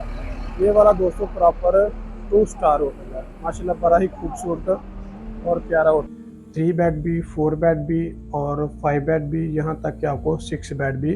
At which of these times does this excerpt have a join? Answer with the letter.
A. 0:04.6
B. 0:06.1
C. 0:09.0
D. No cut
B